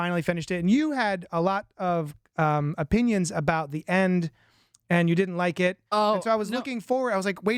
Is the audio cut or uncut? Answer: uncut